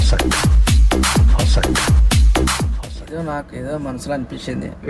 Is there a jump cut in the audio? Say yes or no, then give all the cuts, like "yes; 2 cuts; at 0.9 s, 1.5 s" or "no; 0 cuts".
yes; 1 cut; at 2.8 s